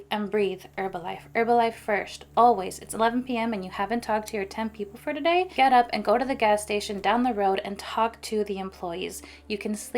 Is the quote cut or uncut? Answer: cut